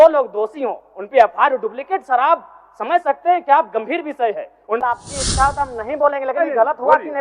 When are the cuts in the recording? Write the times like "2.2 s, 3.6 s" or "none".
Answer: 4.8 s

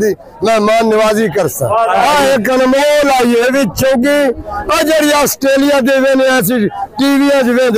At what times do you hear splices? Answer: 2.0 s

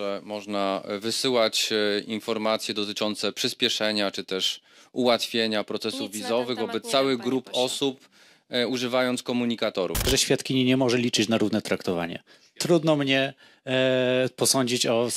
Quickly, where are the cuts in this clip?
10.1 s

